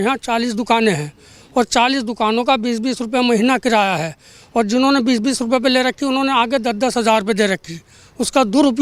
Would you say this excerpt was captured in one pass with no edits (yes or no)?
yes